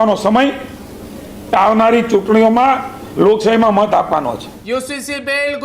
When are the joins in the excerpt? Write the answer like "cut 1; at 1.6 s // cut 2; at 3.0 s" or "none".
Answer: cut 1; at 4.5 s

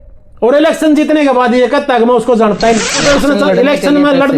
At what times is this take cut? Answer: cut 1; at 3.0 s

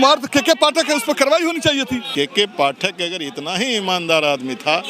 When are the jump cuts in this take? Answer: cut 1; at 2.1 s

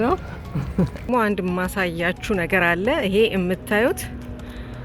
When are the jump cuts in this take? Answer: cut 1; at 1.1 s

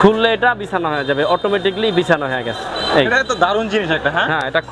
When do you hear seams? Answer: none

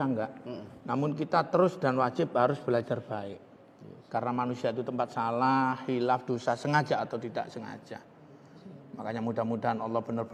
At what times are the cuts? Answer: none

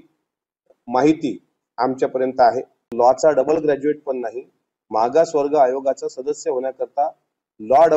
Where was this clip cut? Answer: cut 1; at 2.8 s

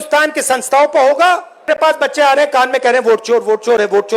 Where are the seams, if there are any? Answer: cut 1; at 1.7 s

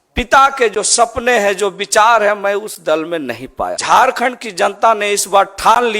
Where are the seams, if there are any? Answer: cut 1; at 3.8 s

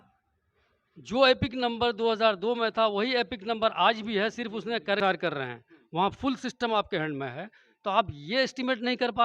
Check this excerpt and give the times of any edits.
cut 1; at 5.0 s

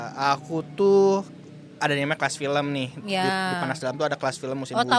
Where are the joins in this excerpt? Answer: none

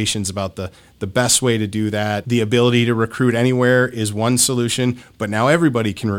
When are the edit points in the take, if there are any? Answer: cut 1; at 2.2 s

